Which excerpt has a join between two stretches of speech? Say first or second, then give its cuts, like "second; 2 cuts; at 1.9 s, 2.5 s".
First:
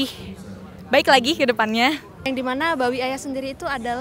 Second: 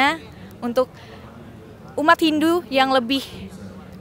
first; 1 cut; at 2.3 s